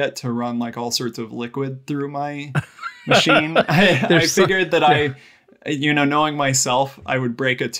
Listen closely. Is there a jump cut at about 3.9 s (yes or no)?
no